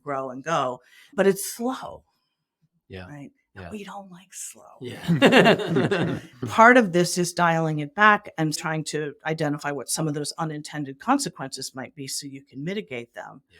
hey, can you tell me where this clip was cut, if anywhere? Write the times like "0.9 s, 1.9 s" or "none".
6.4 s, 8.6 s